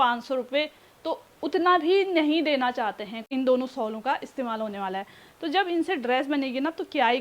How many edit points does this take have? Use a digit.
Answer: 1